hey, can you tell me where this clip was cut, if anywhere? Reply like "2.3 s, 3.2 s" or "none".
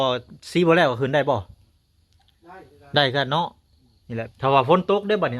4.3 s